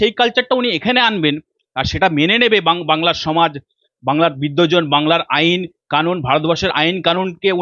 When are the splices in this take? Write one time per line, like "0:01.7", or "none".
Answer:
none